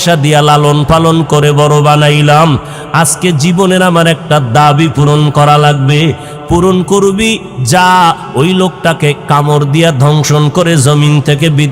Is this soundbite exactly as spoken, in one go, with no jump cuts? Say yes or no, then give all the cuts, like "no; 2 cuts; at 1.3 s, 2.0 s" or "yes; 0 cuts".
yes; 0 cuts